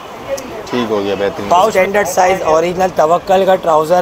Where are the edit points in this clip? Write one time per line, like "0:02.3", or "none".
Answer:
0:01.7